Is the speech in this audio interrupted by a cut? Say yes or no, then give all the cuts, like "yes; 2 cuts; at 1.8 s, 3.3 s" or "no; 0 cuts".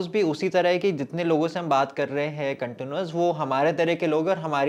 no; 0 cuts